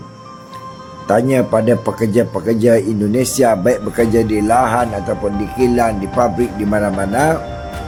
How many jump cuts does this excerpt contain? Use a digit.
0